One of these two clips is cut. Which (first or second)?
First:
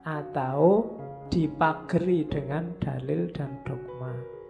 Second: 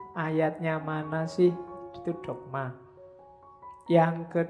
first